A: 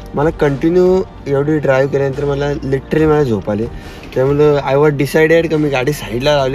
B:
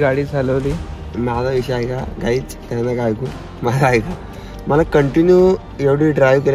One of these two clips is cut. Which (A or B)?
B